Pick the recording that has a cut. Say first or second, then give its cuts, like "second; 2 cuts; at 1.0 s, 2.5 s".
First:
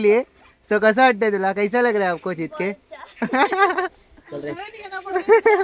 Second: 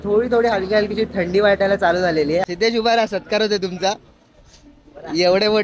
second; 1 cut; at 2.5 s